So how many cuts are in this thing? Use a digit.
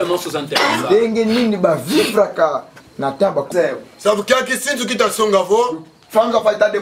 1